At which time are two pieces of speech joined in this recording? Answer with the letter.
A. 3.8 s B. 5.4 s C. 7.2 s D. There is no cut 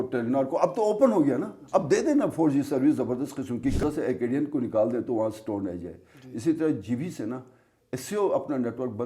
A